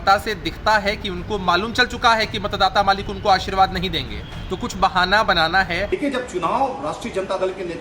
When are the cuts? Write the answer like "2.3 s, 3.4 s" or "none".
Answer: 5.9 s